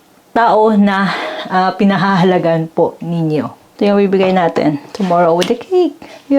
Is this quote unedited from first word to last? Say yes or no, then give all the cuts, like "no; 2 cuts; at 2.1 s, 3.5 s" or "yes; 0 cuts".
no; 1 cut; at 3.8 s